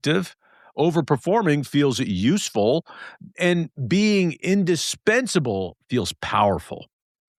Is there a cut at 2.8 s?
no; 0 cuts

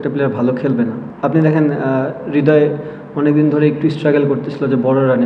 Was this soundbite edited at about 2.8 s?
no; 1 cut; at 1.0 s

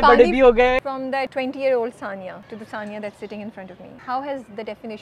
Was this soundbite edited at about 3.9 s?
yes; 3 cuts; at 0.8 s, 2.4 s, 3.9 s

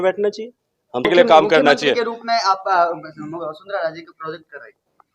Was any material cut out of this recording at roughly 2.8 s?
no; 1 cut; at 1.0 s

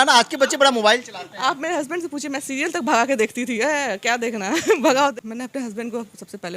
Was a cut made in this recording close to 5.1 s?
yes; 1 cut; at 5.1 s

